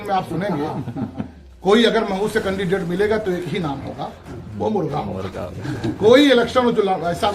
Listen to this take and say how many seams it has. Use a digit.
0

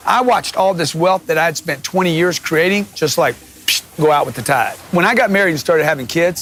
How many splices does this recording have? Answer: 0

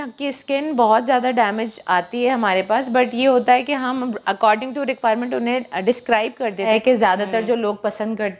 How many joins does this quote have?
1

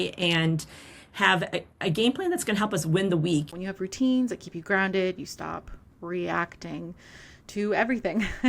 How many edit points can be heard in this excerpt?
1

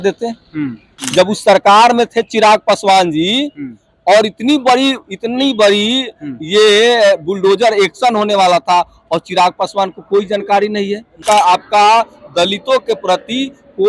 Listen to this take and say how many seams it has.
2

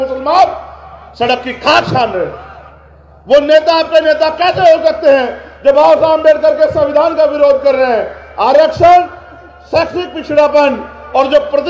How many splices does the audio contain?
0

